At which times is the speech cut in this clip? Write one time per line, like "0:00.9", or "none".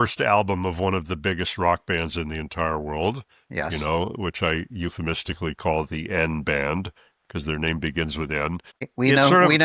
none